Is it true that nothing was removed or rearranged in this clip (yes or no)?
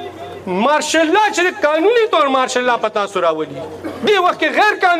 yes